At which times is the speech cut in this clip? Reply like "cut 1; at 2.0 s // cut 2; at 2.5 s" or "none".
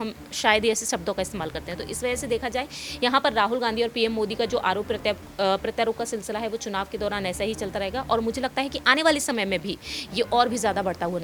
none